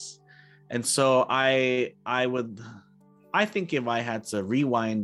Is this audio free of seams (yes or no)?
yes